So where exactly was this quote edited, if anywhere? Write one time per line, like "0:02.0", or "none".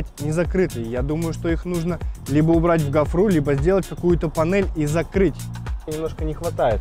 0:05.9